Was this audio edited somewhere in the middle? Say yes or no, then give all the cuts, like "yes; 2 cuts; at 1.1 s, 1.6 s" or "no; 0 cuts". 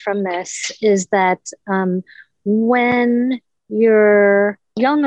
no; 0 cuts